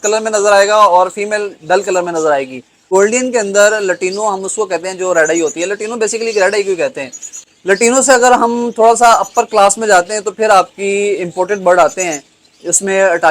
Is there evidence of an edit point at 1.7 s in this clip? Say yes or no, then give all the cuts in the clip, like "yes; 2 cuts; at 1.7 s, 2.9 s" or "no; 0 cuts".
no; 2 cuts; at 2.9 s, 7.3 s